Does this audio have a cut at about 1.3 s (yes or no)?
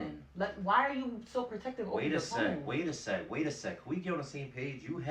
yes